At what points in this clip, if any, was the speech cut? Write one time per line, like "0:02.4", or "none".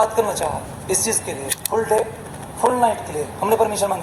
0:01.5

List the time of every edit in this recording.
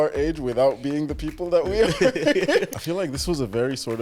0:02.7

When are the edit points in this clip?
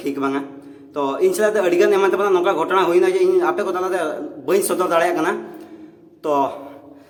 none

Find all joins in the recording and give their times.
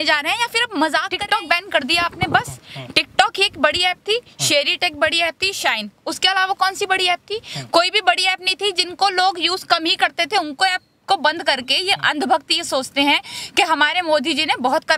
0:01.1

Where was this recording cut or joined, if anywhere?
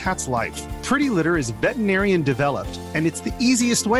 none

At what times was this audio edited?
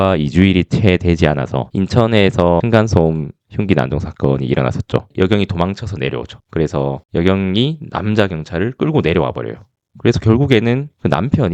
0:01.6
0:02.6
0:05.1

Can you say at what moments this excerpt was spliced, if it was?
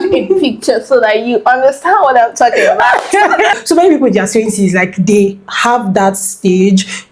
0:03.5

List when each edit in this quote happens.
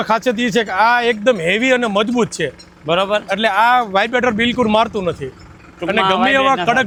none

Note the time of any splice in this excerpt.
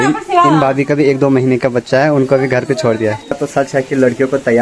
0:03.4

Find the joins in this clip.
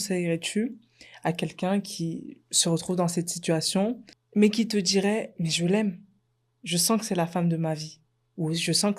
0:04.1

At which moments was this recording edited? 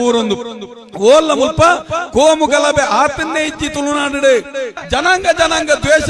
0:04.8

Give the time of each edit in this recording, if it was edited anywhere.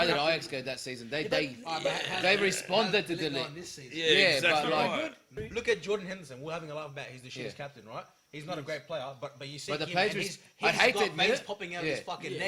0:05.4

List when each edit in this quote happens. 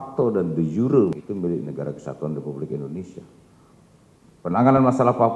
0:01.1

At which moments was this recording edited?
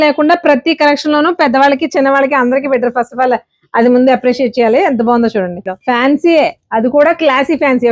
0:05.7

